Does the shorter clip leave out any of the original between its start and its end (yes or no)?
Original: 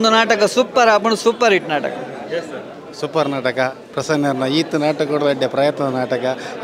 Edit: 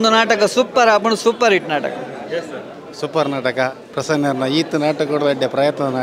no